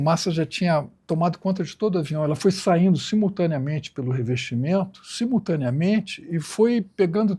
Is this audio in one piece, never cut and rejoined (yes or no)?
no